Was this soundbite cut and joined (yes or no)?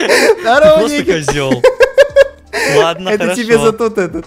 no